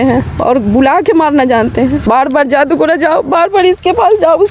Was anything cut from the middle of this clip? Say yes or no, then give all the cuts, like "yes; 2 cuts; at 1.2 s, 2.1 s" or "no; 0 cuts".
yes; 1 cut; at 2.0 s